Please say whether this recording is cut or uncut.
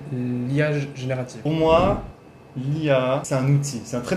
cut